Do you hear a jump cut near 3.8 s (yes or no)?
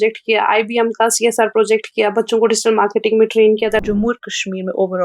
yes